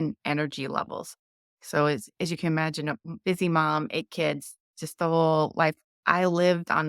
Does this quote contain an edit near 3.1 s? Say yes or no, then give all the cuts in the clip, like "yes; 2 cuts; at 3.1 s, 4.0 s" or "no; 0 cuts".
yes; 2 cuts; at 3.1 s, 5.9 s